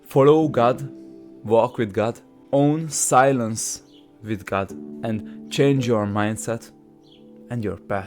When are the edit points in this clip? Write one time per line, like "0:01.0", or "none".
0:02.3
0:04.8